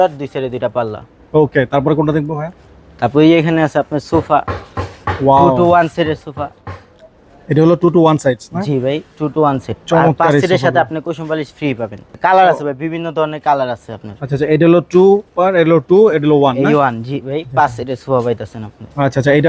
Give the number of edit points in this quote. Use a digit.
0